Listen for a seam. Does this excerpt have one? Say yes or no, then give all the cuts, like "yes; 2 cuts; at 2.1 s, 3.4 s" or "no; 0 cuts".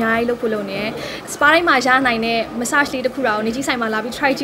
yes; 1 cut; at 1.2 s